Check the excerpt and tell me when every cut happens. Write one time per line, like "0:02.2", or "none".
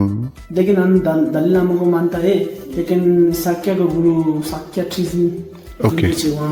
none